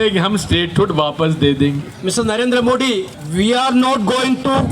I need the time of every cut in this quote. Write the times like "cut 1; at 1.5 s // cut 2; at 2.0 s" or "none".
cut 1; at 1.9 s // cut 2; at 3.2 s